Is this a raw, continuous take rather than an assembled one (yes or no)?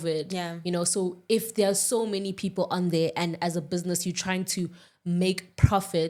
yes